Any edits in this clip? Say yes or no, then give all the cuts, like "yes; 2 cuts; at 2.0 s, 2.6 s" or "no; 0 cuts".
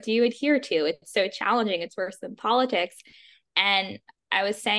no; 0 cuts